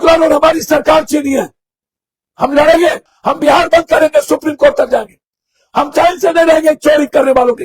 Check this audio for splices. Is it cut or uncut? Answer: cut